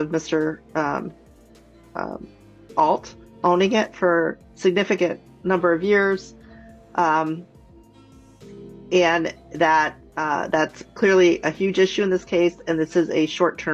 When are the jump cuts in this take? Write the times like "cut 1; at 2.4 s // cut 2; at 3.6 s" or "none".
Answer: none